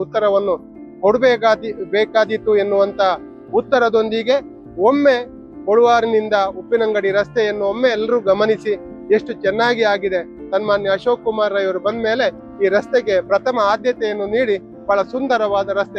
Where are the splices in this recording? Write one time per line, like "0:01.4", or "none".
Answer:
none